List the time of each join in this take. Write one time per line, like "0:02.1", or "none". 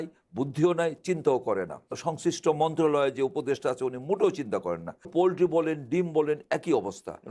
0:01.9
0:05.1